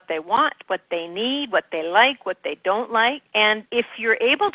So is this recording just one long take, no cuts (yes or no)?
no